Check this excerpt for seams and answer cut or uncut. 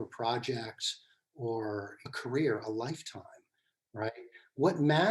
cut